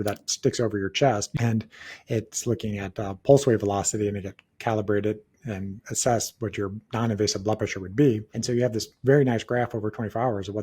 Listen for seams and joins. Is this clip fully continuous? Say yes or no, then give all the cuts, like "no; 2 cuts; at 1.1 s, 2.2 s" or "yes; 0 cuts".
no; 3 cuts; at 1.3 s, 6.8 s, 8.3 s